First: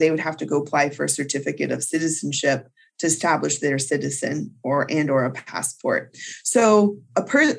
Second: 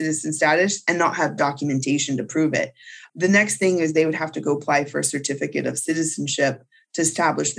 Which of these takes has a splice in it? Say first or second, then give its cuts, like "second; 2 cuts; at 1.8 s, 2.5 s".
second; 1 cut; at 3.0 s